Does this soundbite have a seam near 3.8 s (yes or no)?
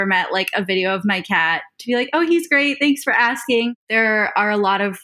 yes